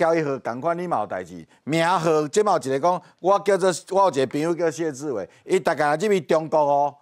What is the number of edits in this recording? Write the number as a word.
zero